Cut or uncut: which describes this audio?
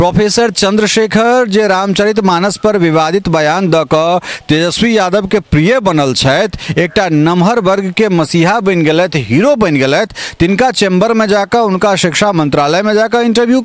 uncut